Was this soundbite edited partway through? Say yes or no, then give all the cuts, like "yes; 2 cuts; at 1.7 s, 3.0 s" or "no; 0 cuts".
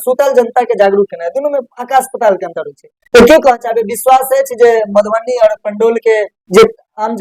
no; 0 cuts